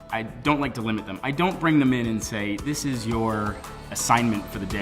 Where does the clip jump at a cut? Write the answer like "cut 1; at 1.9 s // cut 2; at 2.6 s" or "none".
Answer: cut 1; at 3.9 s